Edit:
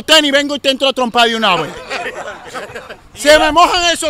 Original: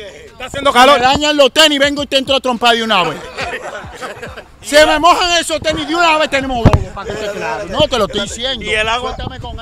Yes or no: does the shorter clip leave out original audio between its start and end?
no